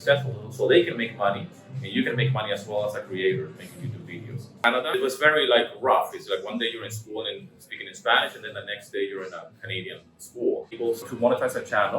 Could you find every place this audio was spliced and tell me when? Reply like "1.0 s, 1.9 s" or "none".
4.9 s, 11.1 s

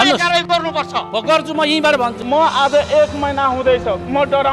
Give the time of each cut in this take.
2.2 s

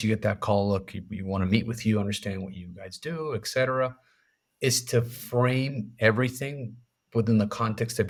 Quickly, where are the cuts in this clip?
none

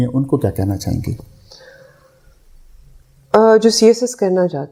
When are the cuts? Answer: none

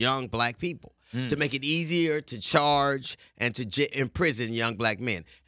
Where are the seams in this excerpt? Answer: none

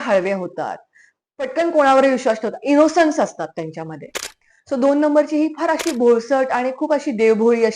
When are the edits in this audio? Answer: none

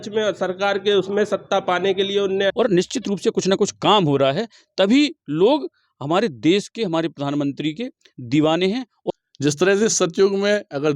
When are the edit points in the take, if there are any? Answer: 2.5 s, 9.0 s

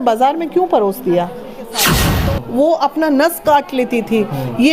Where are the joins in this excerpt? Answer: 2.1 s

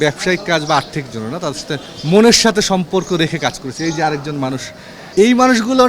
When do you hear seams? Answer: 1.9 s, 4.7 s

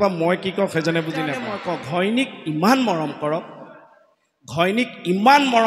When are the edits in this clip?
1.5 s

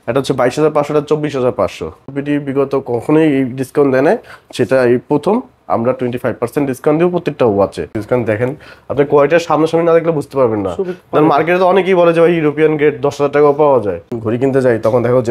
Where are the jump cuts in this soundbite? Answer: 2.1 s, 8.0 s, 14.1 s

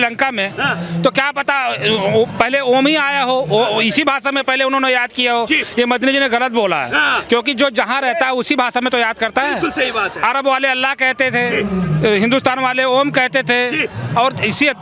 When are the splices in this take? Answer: none

